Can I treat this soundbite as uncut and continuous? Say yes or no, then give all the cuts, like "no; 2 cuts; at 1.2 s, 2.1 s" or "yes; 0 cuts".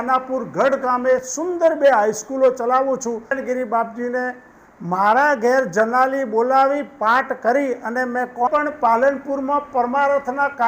no; 2 cuts; at 3.4 s, 8.5 s